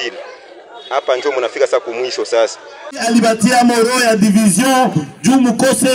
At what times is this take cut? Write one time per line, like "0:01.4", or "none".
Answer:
0:02.8